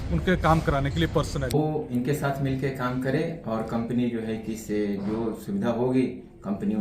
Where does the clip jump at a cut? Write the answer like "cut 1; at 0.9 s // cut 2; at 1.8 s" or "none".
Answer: cut 1; at 1.5 s